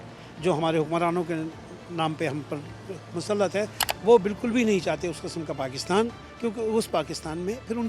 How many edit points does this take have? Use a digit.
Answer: 1